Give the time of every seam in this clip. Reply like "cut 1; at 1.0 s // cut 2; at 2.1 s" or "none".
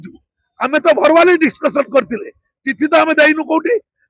none